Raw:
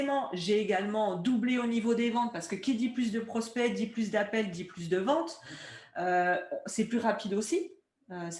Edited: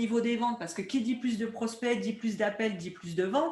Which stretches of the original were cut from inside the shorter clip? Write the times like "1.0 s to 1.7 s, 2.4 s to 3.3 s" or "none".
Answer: none